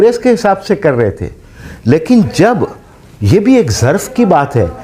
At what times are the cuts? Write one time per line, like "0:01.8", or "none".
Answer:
none